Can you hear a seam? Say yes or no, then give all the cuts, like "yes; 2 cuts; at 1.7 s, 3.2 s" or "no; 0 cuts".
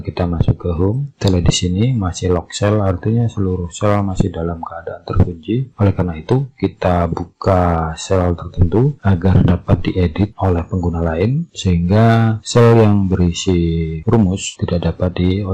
no; 0 cuts